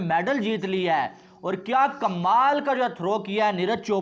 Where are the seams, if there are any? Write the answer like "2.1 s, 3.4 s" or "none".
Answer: none